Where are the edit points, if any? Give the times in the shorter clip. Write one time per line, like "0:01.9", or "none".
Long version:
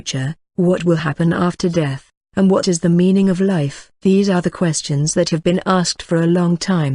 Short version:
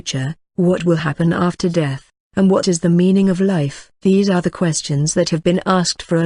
none